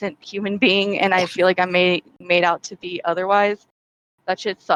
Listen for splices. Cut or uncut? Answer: uncut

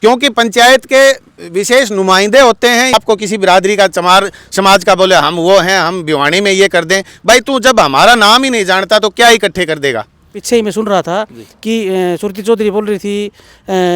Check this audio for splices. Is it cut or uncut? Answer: cut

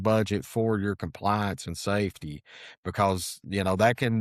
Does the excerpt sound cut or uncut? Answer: uncut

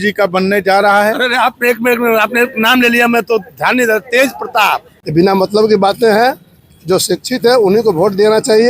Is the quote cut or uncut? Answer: cut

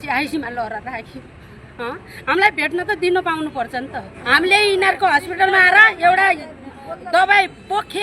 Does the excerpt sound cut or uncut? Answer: cut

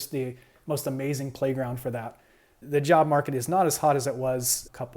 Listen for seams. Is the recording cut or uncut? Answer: cut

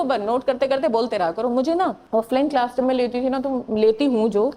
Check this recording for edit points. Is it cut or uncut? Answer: cut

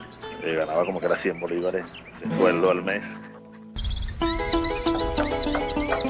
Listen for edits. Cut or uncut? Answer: cut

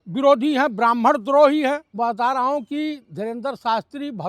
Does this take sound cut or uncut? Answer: cut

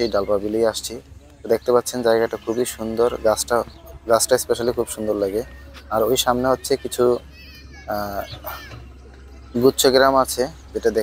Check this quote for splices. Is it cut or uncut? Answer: uncut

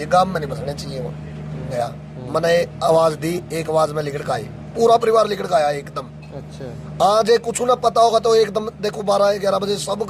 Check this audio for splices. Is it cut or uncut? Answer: cut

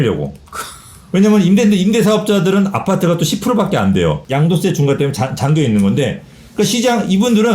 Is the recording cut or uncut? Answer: cut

